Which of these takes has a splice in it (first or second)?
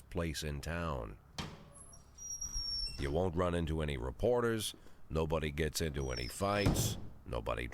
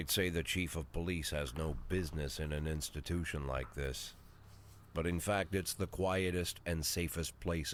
first